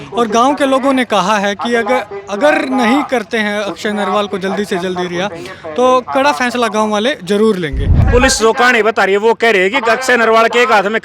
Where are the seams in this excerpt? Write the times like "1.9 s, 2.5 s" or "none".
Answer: 8.0 s